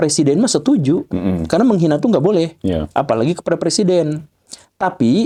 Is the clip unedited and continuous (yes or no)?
yes